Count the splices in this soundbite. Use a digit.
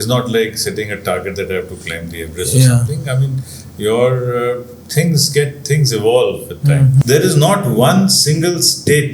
1